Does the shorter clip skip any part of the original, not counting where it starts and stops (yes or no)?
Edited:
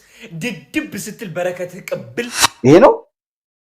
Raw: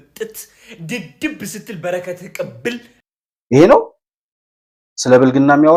yes